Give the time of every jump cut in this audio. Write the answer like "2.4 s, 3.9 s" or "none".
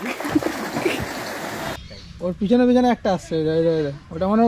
1.7 s